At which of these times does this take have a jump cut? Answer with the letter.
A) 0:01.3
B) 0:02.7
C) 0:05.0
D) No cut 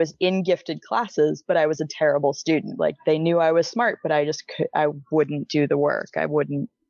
B